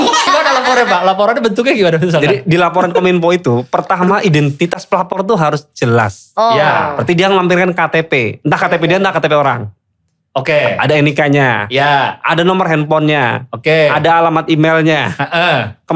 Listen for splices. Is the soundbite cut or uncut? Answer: uncut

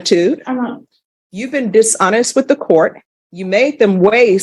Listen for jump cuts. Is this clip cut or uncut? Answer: uncut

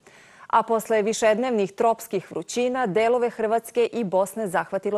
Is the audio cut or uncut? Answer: cut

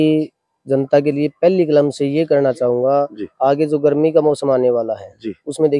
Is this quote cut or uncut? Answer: uncut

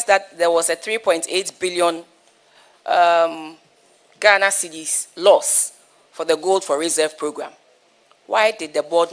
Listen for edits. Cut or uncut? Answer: uncut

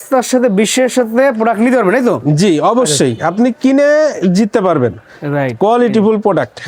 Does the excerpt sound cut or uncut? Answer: uncut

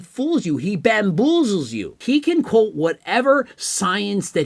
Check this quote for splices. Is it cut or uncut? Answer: cut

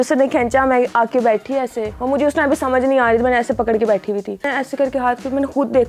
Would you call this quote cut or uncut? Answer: cut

